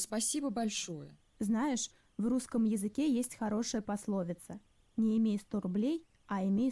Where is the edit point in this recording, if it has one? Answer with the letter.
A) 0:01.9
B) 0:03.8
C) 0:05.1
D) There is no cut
A